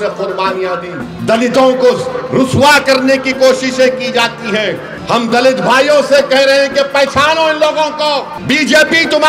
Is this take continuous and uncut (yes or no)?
no